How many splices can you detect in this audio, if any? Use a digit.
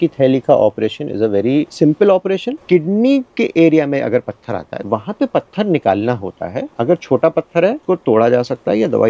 5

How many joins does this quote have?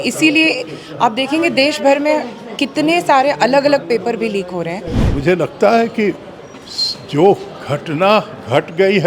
1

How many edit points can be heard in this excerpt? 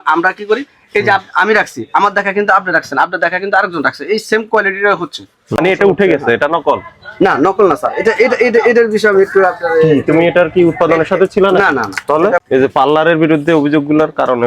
2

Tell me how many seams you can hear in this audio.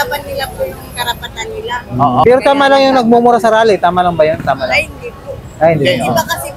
1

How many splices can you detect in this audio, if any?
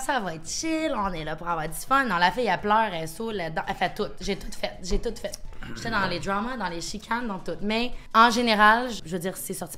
0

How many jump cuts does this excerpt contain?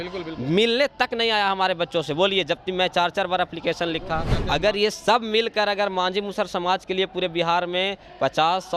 1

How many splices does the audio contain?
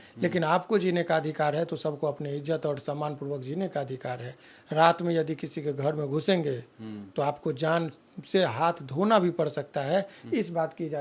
0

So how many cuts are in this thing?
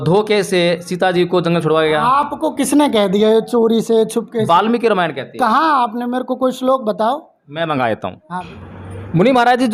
0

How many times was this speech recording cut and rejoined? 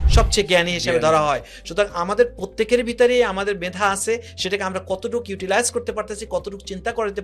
0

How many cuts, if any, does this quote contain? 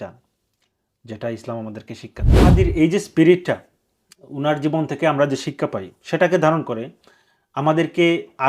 1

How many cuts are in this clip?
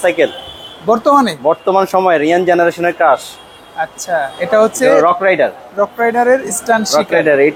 0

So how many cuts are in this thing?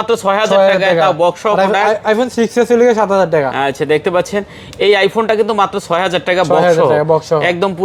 0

